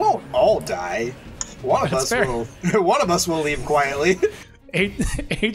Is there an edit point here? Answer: no; 0 cuts

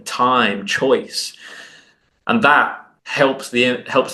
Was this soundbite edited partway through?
yes; 1 cut; at 2.8 s

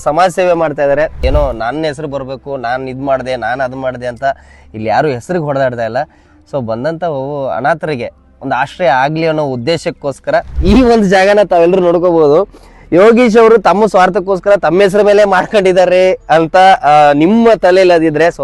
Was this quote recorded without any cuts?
no; 2 cuts; at 1.2 s, 10.5 s

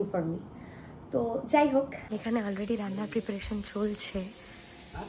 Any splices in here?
yes; 1 cut; at 2.0 s

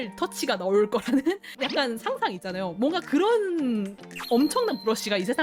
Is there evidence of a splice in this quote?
no; 0 cuts

